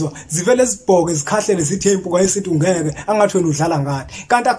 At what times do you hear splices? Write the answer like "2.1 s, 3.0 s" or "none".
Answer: none